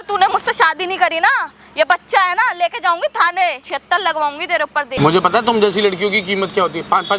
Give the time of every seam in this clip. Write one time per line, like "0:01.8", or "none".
0:03.7
0:04.9

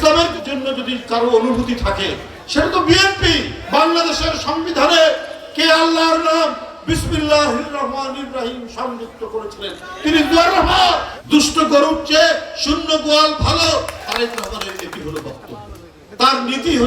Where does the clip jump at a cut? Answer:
0:11.2
0:14.0

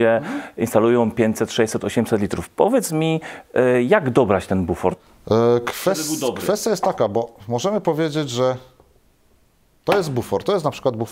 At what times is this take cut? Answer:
none

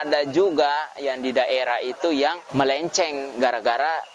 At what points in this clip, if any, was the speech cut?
0:02.4

